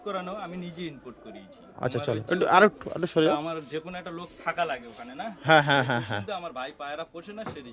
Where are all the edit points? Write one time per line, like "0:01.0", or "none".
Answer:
none